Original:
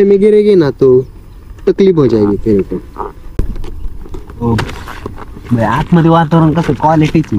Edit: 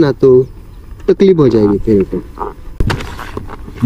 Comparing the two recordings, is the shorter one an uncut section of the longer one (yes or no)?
no